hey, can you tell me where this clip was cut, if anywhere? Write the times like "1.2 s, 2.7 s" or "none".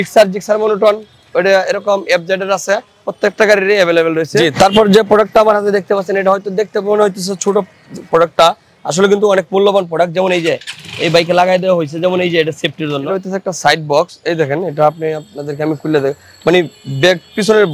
3.0 s, 4.4 s, 13.1 s

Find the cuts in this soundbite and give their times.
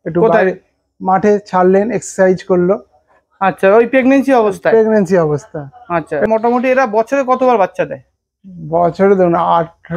6.2 s

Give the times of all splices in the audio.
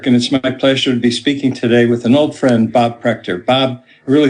none

